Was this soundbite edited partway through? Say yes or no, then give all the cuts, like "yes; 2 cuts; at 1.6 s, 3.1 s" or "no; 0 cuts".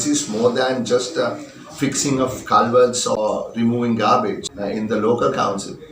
yes; 2 cuts; at 3.2 s, 4.5 s